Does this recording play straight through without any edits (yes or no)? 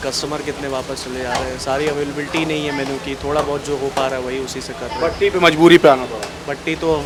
yes